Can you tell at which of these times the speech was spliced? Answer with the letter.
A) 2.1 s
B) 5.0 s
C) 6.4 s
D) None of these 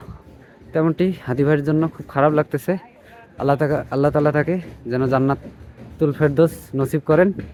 D